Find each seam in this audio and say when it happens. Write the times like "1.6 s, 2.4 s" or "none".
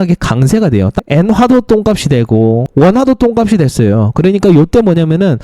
1.0 s, 2.7 s